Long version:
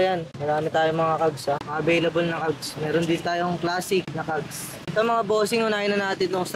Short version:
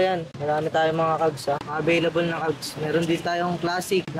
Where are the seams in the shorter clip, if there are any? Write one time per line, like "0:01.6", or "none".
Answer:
none

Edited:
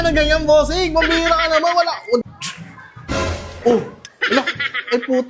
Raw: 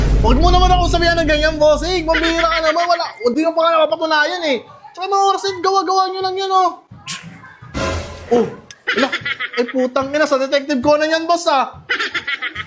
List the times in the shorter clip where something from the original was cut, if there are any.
0:02.2

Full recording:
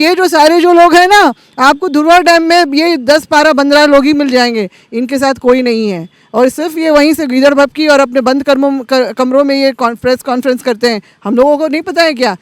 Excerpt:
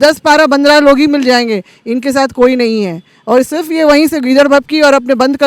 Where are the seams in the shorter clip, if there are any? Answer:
none

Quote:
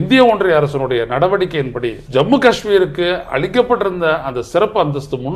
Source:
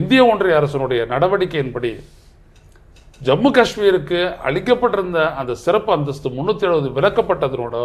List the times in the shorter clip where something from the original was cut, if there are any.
0:02.0

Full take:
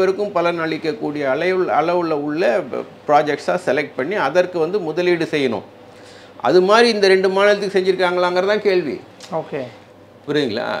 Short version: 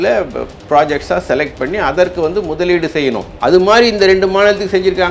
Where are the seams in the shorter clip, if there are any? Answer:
0:03.3

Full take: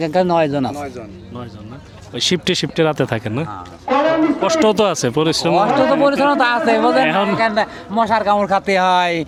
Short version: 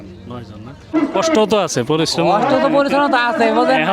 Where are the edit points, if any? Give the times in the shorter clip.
0:00.9

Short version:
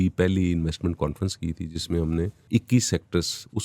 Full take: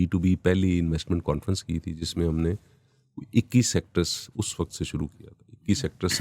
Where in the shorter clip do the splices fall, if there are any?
0:02.4

